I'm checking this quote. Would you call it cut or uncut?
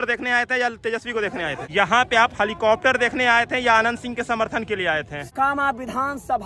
cut